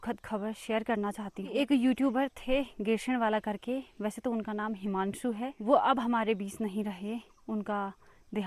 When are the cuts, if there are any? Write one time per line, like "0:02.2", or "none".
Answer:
0:01.5
0:05.6